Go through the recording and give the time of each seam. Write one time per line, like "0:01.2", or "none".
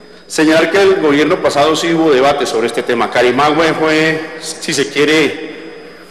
0:01.5